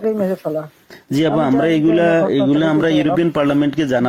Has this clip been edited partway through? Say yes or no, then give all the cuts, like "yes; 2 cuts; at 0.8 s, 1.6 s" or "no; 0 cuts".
no; 0 cuts